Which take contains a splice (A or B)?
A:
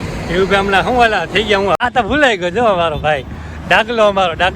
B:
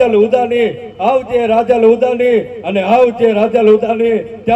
A